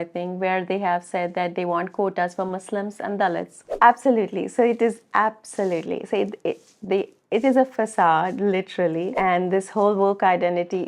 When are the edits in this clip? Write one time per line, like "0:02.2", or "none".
0:03.6
0:09.1